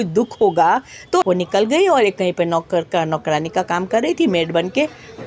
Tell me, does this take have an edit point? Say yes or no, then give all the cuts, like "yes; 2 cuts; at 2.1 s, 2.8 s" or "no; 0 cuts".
yes; 1 cut; at 1.2 s